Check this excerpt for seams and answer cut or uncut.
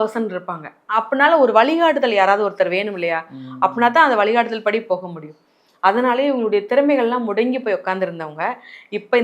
uncut